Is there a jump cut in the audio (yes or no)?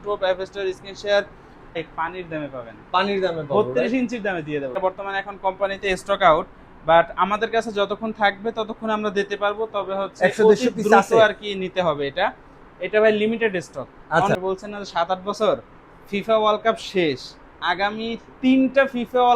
yes